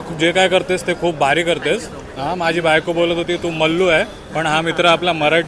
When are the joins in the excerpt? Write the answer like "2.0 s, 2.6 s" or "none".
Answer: none